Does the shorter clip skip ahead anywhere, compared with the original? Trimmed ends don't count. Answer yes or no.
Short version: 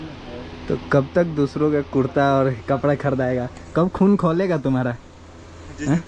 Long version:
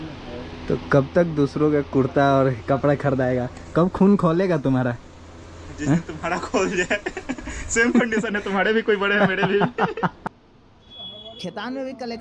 no